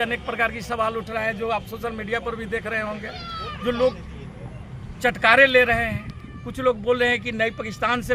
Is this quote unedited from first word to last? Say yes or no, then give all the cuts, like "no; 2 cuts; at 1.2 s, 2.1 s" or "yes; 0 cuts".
yes; 0 cuts